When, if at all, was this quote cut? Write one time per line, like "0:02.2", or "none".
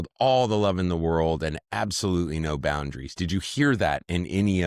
none